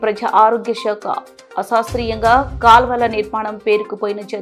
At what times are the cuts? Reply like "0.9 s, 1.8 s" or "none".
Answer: none

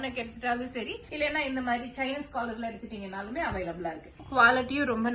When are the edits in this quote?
4.2 s

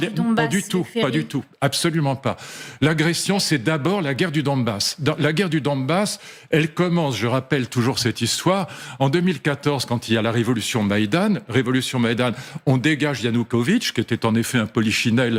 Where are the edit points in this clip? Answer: none

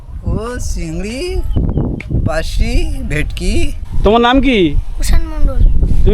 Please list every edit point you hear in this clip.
3.8 s

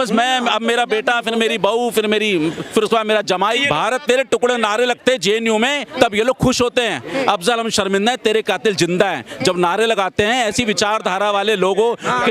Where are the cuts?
3.6 s

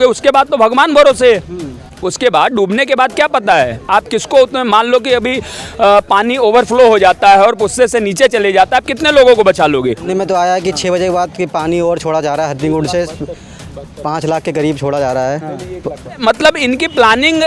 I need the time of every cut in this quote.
10.0 s, 16.2 s

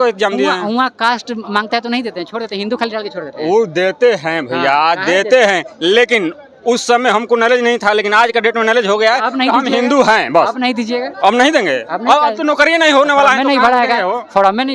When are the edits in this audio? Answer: none

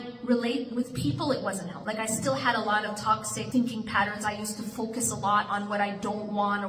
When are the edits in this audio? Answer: 1.7 s, 3.3 s

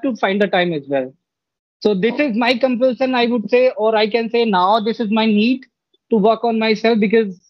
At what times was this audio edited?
none

